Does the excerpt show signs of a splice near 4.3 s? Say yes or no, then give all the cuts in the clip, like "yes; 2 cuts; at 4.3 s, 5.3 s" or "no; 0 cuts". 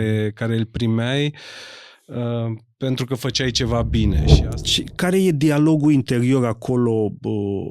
yes; 1 cut; at 4.3 s